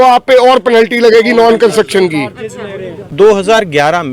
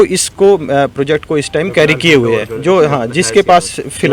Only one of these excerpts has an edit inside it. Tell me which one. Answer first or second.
first